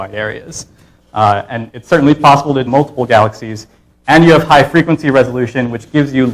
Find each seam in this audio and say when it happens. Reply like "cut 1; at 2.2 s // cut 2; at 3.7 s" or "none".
none

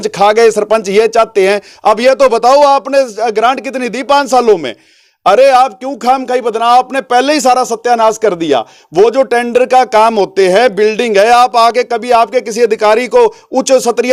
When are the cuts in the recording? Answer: none

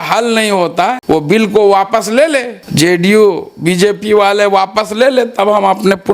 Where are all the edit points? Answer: cut 1; at 1.0 s // cut 2; at 2.6 s

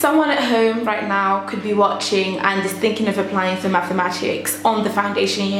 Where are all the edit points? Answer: none

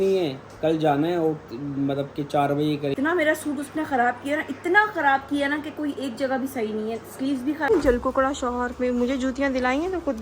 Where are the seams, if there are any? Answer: cut 1; at 2.9 s // cut 2; at 7.7 s

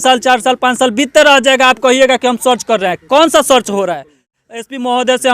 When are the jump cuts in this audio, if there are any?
cut 1; at 4.4 s

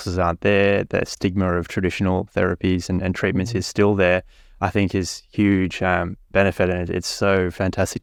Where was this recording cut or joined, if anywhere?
none

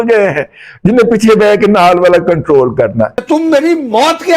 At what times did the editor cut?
cut 1; at 3.2 s

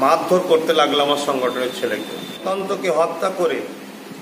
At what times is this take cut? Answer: cut 1; at 2.4 s

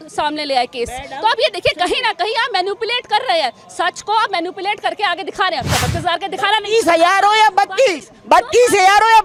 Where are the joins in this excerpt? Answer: none

